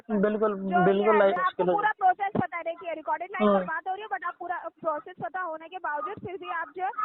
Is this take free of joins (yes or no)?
no